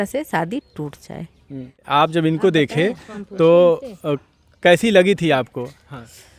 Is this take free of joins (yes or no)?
no